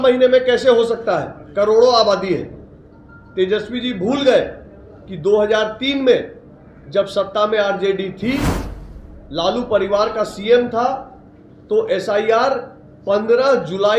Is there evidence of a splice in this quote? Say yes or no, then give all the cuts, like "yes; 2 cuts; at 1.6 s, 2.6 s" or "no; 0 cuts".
no; 0 cuts